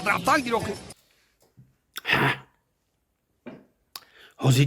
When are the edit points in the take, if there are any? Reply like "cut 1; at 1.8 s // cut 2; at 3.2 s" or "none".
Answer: cut 1; at 0.9 s